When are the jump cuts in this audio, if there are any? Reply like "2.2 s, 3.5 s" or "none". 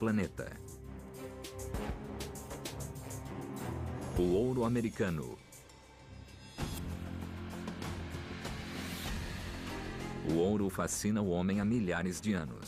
10.7 s